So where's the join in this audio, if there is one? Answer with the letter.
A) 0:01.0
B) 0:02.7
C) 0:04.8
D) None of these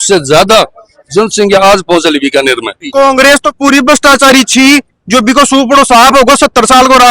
B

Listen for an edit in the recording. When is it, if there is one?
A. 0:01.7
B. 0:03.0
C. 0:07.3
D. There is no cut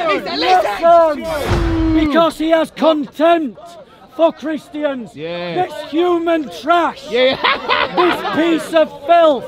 A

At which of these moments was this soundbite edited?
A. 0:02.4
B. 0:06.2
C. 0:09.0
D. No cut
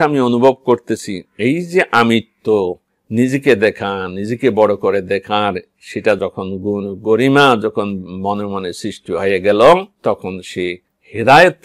B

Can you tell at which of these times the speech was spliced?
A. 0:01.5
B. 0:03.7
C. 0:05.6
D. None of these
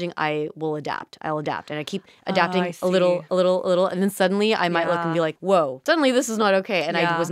C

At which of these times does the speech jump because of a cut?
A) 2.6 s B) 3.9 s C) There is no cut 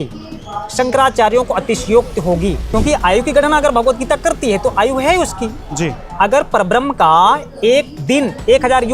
A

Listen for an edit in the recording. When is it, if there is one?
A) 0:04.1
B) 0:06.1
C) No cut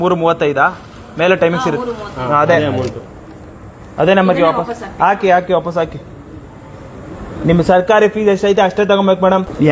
C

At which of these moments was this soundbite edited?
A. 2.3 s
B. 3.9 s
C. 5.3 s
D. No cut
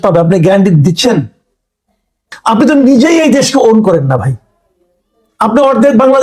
A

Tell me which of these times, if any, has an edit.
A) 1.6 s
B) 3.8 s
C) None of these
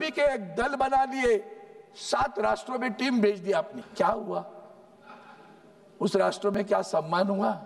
B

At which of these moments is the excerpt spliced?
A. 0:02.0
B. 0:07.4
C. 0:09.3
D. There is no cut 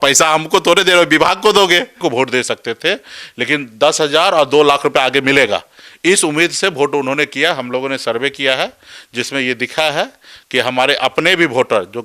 A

